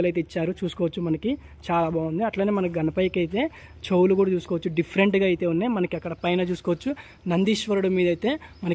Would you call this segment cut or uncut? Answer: uncut